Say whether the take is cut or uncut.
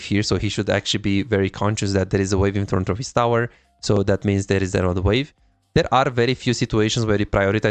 uncut